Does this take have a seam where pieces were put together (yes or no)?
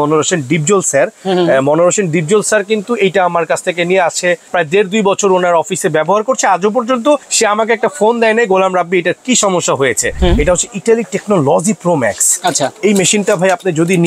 yes